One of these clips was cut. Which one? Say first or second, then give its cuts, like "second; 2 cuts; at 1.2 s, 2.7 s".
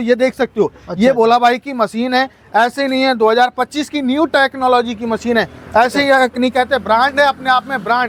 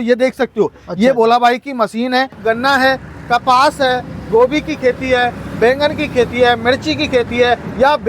second; 1 cut; at 2.4 s